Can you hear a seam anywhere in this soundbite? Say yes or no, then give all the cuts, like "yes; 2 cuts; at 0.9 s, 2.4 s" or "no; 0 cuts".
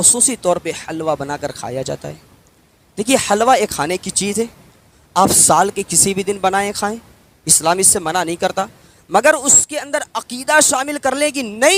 no; 0 cuts